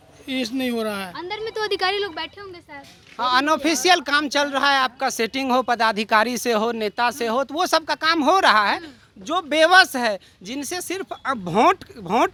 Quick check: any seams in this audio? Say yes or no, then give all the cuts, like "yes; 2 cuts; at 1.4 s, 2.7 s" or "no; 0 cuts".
no; 0 cuts